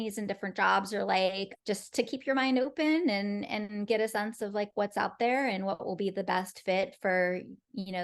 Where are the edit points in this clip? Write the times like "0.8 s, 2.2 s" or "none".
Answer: 1.5 s

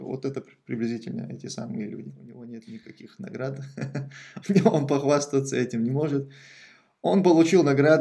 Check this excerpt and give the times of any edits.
2.5 s

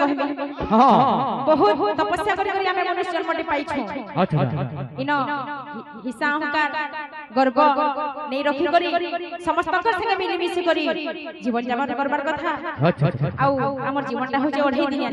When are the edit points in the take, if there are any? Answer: none

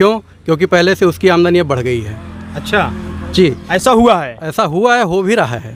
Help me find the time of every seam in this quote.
none

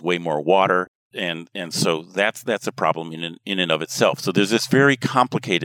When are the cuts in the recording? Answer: 1.0 s

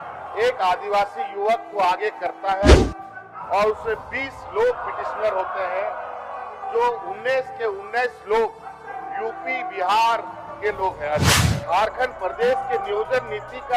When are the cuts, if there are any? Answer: 11.4 s

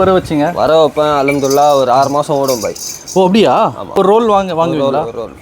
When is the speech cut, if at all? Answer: 4.0 s

